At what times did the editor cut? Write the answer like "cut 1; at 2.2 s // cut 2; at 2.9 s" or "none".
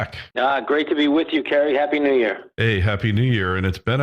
cut 1; at 2.7 s